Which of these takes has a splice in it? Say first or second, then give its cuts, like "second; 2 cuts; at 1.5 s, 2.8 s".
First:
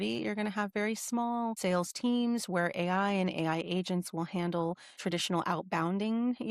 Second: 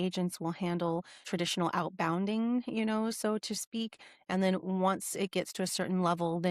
first; 1 cut; at 1.6 s